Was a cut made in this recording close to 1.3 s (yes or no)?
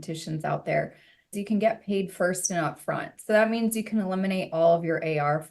yes